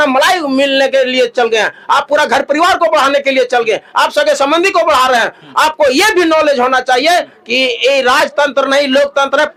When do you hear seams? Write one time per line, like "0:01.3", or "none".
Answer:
none